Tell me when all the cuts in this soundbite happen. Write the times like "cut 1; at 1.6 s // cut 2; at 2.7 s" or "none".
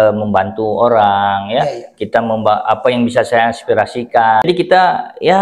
cut 1; at 4.4 s